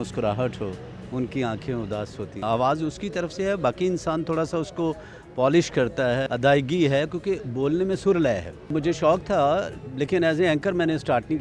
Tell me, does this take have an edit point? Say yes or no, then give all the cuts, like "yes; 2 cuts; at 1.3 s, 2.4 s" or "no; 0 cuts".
yes; 3 cuts; at 2.4 s, 6.2 s, 8.7 s